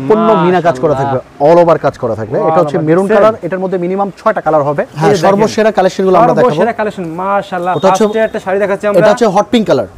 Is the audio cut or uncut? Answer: cut